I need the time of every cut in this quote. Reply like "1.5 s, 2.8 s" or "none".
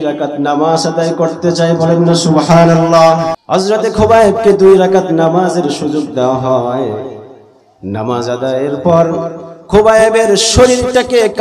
3.4 s